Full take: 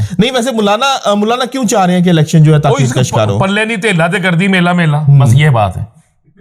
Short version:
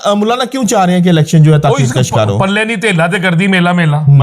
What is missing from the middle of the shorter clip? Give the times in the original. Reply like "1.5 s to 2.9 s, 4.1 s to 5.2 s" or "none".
none